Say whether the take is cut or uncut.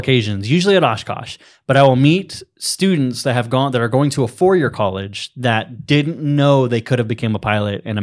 uncut